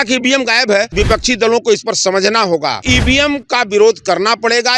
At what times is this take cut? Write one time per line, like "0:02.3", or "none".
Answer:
0:00.9
0:02.9